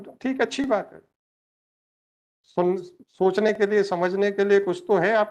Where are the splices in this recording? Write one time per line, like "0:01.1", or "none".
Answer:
none